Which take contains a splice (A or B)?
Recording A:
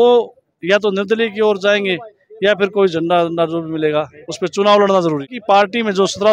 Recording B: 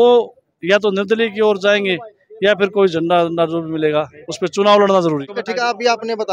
B